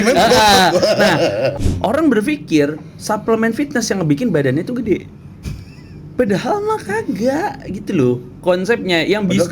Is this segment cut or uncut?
cut